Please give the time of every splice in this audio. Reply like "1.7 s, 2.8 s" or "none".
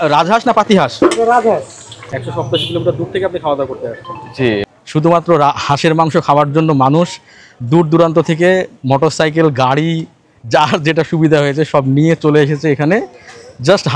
2.0 s, 4.6 s